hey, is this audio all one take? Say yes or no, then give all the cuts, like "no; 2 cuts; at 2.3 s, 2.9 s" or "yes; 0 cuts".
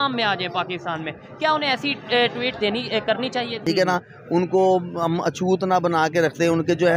no; 1 cut; at 3.6 s